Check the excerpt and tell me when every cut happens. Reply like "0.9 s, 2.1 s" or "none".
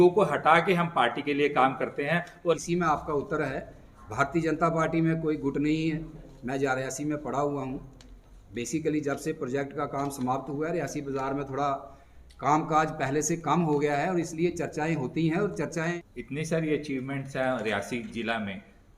2.6 s, 15.7 s